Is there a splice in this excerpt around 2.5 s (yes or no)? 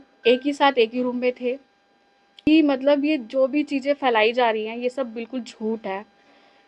yes